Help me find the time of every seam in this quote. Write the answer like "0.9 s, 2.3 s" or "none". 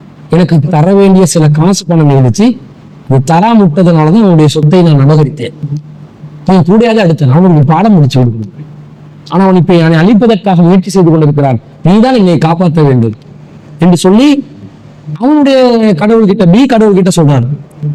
none